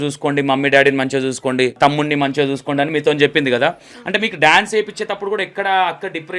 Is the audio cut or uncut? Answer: cut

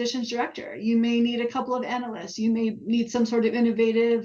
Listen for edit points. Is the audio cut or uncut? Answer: uncut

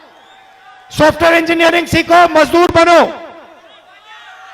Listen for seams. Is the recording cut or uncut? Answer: uncut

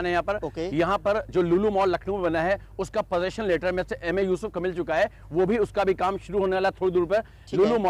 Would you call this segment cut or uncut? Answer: uncut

